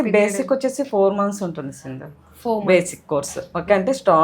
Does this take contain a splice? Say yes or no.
no